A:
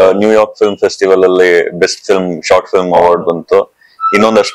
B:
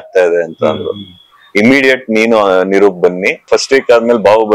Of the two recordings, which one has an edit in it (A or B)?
B